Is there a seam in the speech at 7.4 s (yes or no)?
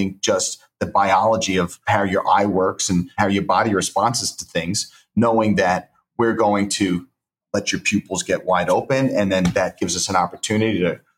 yes